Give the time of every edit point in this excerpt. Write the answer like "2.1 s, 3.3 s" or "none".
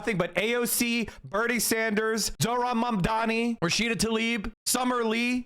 3.6 s

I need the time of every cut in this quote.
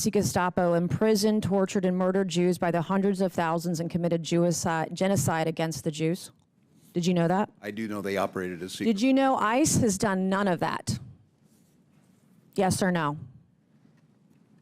none

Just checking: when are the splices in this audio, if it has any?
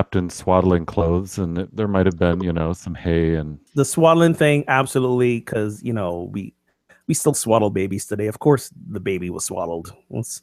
3.6 s

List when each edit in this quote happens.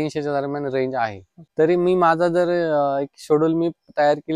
1.4 s

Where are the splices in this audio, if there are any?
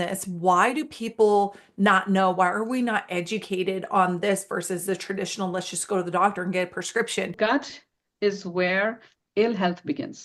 7.3 s

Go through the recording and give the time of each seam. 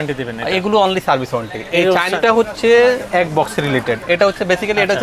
2.2 s

